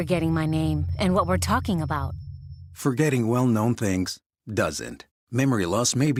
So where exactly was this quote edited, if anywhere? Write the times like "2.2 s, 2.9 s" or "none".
none